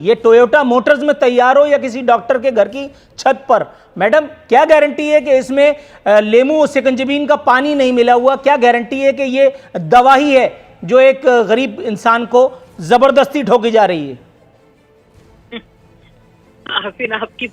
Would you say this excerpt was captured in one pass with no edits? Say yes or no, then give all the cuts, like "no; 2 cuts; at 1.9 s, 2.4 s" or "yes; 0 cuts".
yes; 0 cuts